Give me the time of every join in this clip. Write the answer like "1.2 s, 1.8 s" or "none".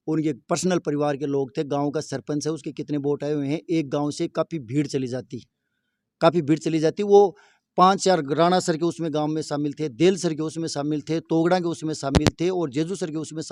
none